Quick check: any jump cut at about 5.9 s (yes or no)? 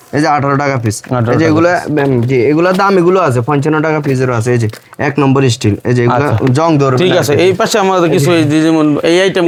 no